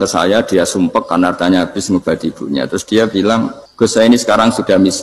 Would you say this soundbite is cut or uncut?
cut